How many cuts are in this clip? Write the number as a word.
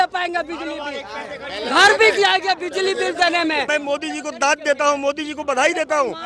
one